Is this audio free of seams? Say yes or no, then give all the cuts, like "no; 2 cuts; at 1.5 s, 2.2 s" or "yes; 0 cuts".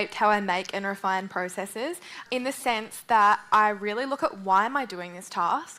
no; 1 cut; at 2.2 s